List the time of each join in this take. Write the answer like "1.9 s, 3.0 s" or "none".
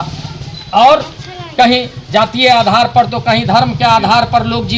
none